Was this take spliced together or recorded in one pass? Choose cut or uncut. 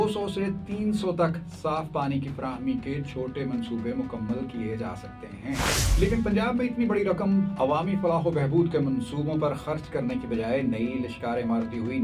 cut